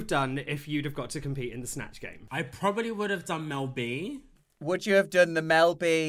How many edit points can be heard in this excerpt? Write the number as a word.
two